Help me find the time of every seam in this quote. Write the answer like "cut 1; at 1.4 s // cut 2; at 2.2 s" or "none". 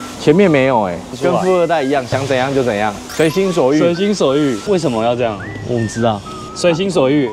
cut 1; at 1.1 s // cut 2; at 4.6 s